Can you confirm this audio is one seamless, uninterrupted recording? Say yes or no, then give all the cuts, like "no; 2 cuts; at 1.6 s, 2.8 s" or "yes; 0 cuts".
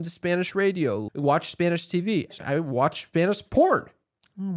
no; 2 cuts; at 1.0 s, 2.3 s